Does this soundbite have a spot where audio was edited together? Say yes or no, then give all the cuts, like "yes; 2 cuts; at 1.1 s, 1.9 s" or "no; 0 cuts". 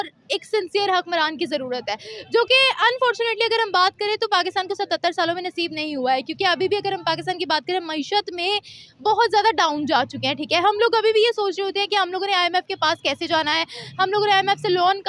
no; 0 cuts